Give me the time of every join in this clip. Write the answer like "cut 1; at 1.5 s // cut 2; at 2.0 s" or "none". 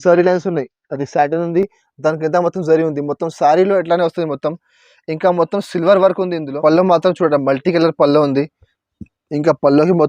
cut 1; at 6.5 s